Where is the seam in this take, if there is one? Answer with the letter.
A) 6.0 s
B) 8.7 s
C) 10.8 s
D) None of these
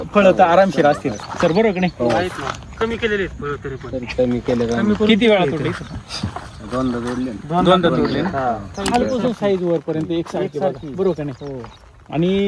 B